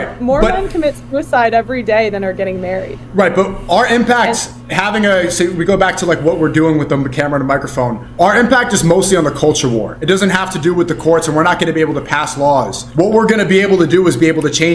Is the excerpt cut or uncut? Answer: cut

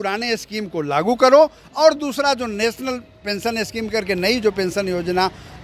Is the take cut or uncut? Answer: uncut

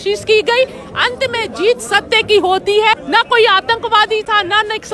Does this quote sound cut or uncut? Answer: cut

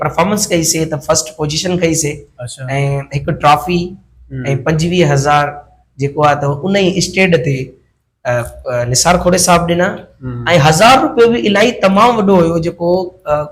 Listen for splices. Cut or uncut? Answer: uncut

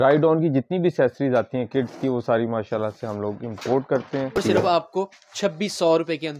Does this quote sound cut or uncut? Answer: cut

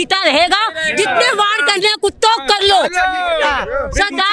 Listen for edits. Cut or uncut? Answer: uncut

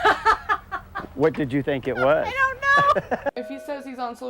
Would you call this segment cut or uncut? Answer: cut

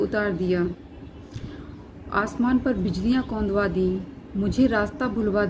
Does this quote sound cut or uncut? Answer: uncut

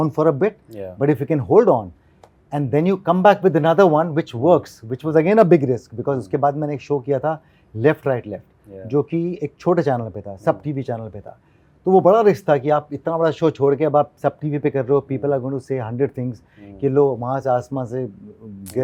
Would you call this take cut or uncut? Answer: uncut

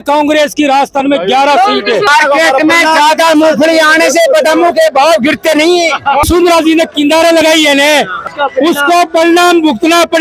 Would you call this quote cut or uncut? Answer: cut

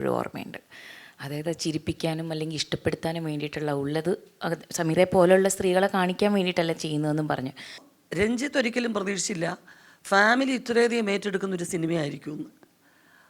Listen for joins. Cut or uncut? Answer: cut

